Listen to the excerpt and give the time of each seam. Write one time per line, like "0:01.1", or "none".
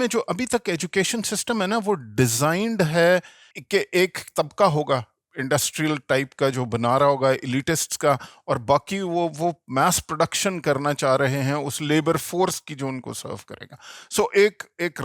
0:04.0

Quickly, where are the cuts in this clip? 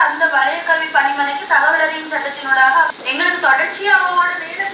0:02.9

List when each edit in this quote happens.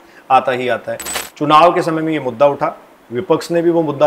0:01.1

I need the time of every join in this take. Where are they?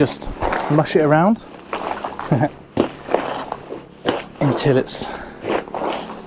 none

